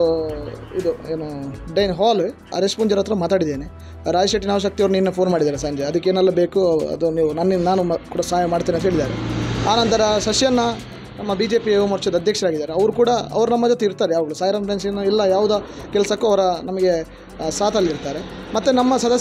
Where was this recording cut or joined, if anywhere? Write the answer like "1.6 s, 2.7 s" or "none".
2.5 s